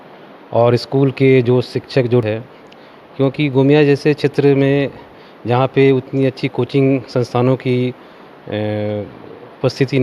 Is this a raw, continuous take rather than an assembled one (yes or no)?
no